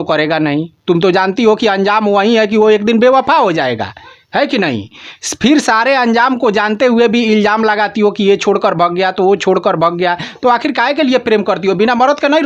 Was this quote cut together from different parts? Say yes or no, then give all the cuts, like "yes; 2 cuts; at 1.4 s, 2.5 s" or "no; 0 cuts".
no; 0 cuts